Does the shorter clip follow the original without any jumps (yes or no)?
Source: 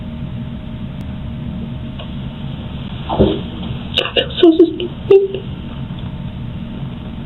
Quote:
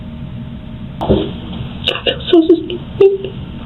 no